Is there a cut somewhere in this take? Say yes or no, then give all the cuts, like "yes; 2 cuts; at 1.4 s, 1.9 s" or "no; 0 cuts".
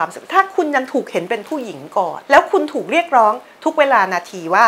yes; 1 cut; at 2.2 s